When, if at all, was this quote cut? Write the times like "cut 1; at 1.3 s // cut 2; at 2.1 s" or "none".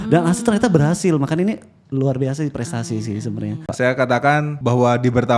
cut 1; at 3.7 s // cut 2; at 4.5 s